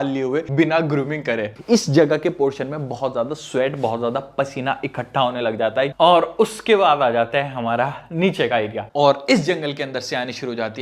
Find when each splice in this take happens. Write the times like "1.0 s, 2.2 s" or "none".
1.5 s, 5.9 s, 8.8 s